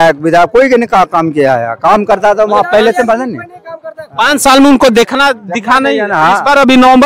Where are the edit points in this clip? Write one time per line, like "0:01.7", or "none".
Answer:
none